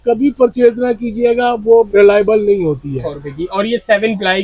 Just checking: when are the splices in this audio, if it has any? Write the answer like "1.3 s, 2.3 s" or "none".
1.9 s, 3.2 s